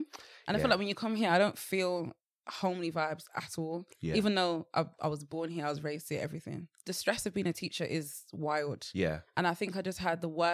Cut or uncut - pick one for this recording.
cut